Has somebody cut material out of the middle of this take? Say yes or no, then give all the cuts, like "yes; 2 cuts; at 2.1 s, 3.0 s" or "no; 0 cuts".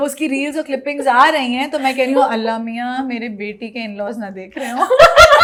no; 0 cuts